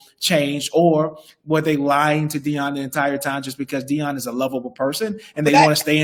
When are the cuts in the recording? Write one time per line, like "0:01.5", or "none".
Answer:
none